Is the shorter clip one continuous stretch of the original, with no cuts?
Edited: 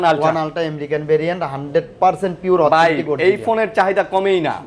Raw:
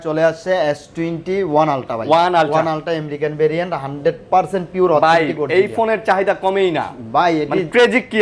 yes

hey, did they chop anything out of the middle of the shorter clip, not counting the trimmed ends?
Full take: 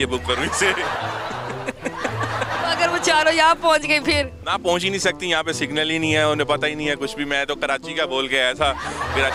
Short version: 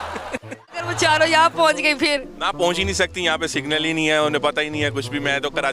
yes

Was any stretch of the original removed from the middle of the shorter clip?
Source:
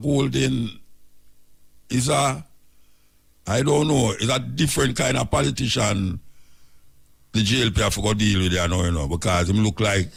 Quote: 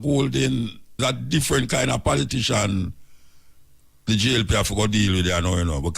yes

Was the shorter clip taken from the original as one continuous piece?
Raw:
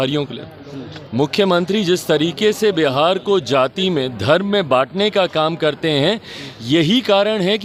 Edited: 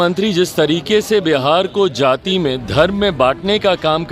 yes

